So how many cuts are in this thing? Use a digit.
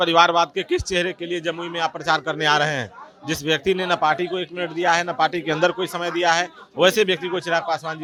0